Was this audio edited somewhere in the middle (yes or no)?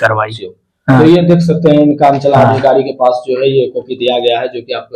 no